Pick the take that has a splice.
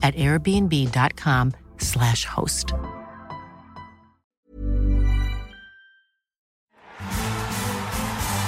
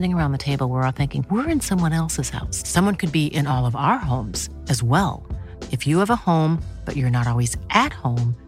first; 1 cut; at 6.7 s

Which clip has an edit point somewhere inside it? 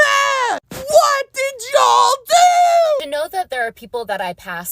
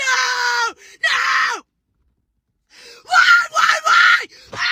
first; 1 cut; at 3.0 s

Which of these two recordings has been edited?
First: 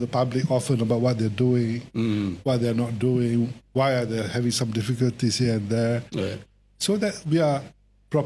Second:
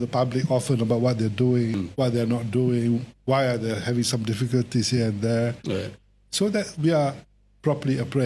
second; 1 cut; at 1.8 s

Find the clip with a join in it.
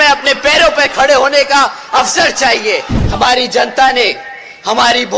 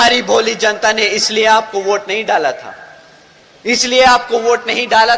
first; 1 cut; at 2.9 s

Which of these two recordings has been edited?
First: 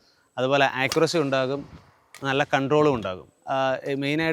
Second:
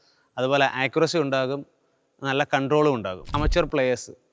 second; 1 cut; at 3.3 s

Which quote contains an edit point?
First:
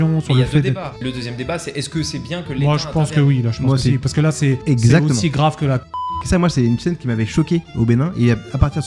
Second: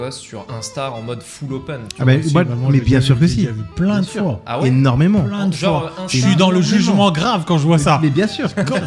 first; 3 cuts; at 0.9 s, 4.6 s, 5.9 s

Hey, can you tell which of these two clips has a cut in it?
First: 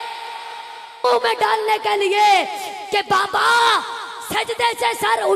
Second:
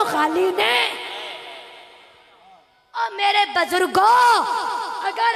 first; 1 cut; at 1.0 s

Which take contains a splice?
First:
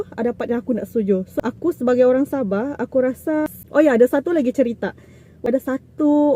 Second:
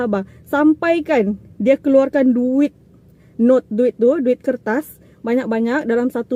first; 3 cuts; at 1.3 s, 3.6 s, 5.4 s

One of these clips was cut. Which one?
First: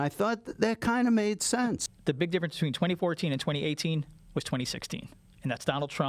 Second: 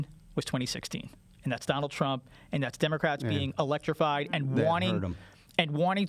first; 1 cut; at 1.9 s

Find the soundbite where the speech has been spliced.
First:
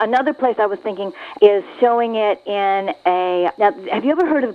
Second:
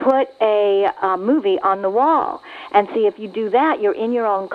first; 2 cuts; at 1.2 s, 3.5 s

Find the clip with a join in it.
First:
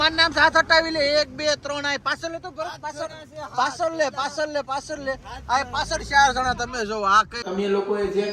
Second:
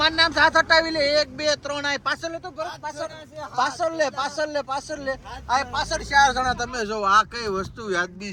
first; 1 cut; at 7.4 s

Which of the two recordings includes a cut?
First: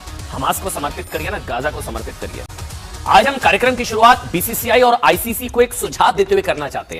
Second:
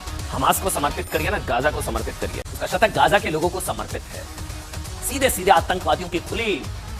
second; 1 cut; at 2.4 s

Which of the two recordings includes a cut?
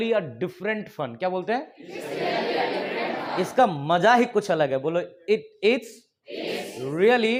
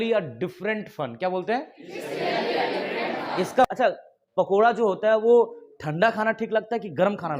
second; 1 cut; at 3.7 s

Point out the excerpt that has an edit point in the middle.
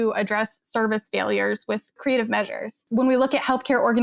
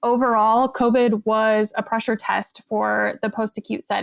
first; 2 cuts; at 2.0 s, 2.7 s

